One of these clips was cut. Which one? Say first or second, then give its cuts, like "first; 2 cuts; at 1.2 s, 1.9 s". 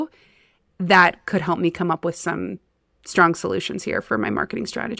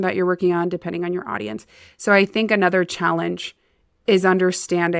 first; 1 cut; at 4.0 s